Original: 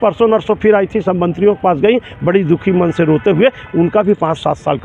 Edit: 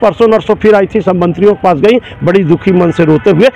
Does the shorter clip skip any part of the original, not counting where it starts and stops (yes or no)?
no